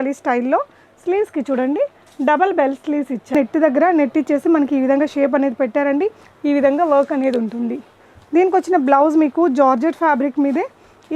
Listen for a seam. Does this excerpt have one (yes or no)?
yes